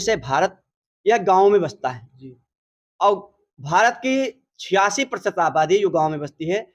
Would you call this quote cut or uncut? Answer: uncut